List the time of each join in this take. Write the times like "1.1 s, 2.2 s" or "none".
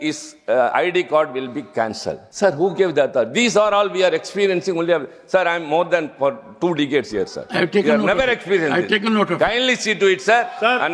2.2 s